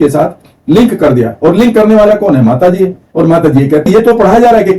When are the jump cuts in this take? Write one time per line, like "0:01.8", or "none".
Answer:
0:03.9